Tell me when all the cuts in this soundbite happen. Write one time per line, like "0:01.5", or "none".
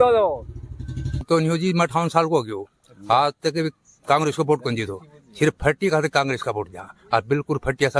0:01.2